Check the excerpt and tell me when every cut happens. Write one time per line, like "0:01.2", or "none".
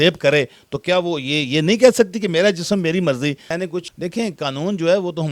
0:03.6